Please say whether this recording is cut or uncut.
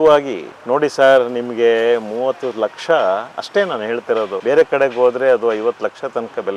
uncut